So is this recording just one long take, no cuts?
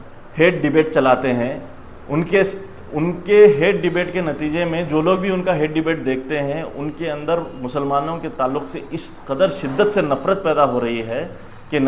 yes; 0 cuts

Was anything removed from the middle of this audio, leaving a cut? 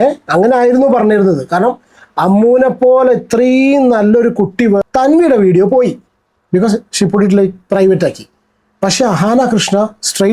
yes; 1 cut; at 4.8 s

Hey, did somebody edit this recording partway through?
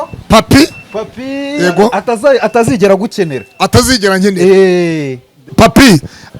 yes; 1 cut; at 5.5 s

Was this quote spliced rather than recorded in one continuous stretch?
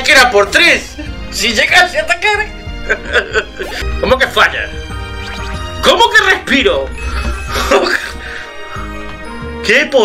yes; 1 cut; at 3.8 s

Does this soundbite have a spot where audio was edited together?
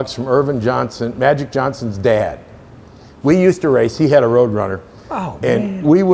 no; 0 cuts

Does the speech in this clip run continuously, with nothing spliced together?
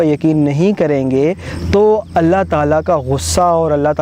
yes; 0 cuts

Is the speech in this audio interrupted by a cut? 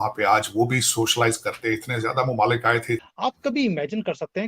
yes; 1 cut; at 3.1 s

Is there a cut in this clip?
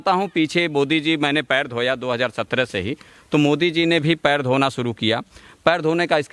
no; 0 cuts

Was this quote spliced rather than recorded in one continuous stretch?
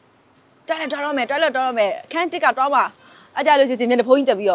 no; 0 cuts

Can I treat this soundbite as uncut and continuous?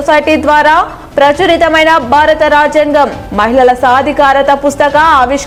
yes; 0 cuts

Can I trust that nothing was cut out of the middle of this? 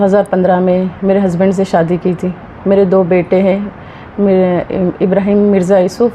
yes; 0 cuts

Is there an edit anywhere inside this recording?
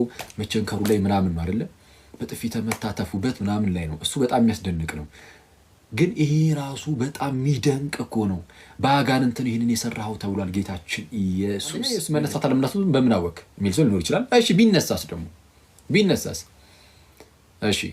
yes; 1 cut; at 12.0 s

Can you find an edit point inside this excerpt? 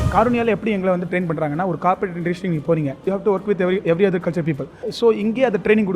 yes; 2 cuts; at 3.0 s, 4.9 s

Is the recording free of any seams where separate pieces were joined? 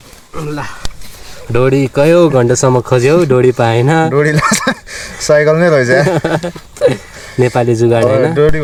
yes; 0 cuts

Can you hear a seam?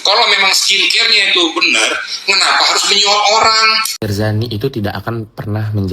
yes; 1 cut; at 3.9 s

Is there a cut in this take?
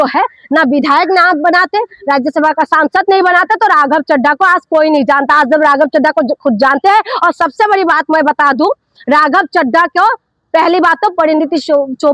no; 0 cuts

